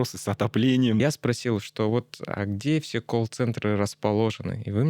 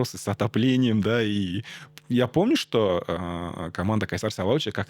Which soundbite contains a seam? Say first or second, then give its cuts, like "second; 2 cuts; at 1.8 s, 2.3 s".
first; 1 cut; at 1.0 s